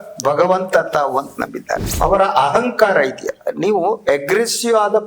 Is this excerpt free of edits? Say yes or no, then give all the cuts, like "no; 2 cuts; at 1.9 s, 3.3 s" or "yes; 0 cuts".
no; 1 cut; at 1.9 s